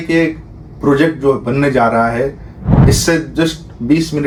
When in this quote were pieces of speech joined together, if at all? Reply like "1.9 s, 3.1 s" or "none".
none